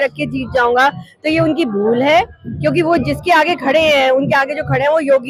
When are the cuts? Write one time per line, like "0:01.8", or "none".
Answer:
none